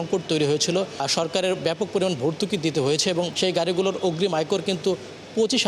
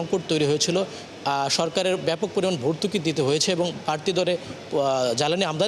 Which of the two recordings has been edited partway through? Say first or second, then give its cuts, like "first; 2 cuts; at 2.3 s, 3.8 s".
first; 2 cuts; at 1.1 s, 3.3 s